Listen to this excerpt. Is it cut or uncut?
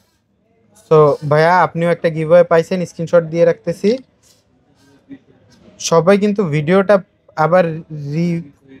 uncut